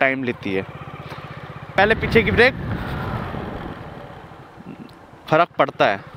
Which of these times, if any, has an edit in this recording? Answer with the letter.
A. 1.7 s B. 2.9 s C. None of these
A